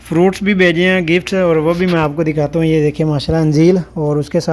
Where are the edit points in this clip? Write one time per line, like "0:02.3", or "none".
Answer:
none